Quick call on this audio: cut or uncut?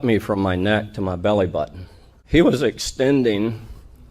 cut